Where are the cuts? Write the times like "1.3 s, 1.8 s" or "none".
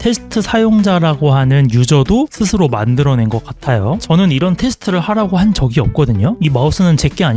6.4 s